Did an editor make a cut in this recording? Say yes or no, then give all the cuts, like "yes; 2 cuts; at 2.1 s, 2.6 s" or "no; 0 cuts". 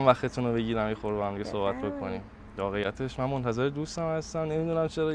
no; 0 cuts